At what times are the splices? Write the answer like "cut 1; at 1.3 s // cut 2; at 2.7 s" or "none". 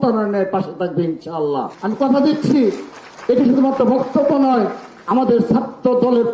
none